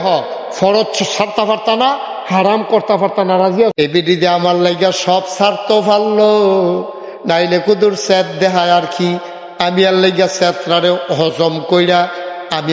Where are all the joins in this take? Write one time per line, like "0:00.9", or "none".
0:03.7